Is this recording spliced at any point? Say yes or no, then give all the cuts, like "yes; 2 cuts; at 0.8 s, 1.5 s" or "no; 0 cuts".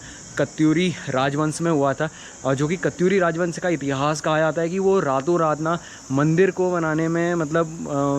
no; 0 cuts